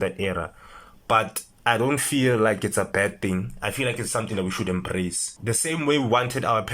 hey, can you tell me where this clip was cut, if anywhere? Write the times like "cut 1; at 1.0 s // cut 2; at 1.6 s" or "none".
cut 1; at 1.4 s // cut 2; at 5.3 s